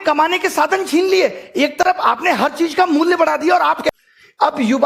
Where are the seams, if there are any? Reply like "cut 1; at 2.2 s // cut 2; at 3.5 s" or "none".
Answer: cut 1; at 3.9 s